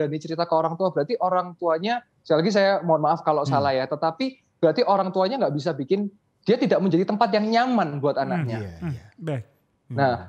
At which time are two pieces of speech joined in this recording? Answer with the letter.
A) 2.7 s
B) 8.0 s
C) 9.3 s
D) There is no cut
D